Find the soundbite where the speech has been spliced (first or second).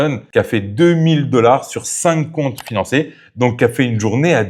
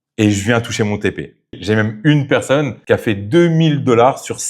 second